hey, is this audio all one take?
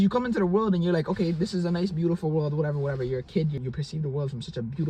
no; 1 cut; at 3.6 s

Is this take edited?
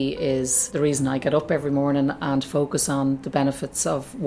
no; 0 cuts

